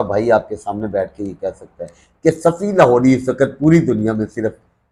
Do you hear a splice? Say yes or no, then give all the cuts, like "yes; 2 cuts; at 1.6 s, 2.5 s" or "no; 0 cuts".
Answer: no; 0 cuts